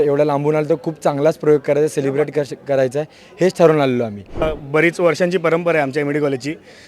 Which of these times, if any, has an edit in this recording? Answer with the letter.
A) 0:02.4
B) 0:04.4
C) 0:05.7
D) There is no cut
B